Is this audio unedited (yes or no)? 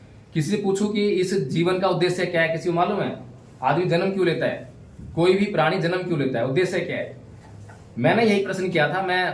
yes